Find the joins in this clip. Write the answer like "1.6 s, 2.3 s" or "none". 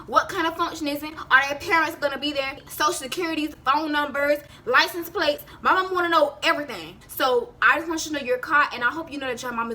7.0 s